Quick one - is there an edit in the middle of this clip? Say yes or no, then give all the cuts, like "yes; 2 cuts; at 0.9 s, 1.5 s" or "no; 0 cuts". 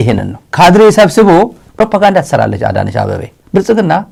no; 0 cuts